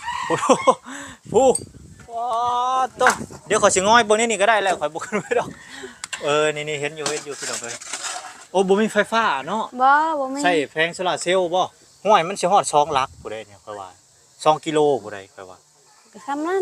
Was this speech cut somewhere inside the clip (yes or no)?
yes